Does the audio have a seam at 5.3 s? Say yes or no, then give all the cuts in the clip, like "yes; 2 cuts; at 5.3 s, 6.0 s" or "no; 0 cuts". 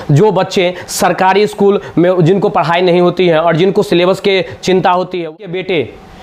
yes; 1 cut; at 5.3 s